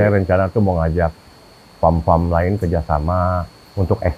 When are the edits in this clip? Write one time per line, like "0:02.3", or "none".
none